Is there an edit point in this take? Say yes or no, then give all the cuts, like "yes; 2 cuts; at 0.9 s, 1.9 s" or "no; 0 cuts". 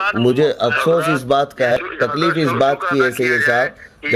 yes; 1 cut; at 1.7 s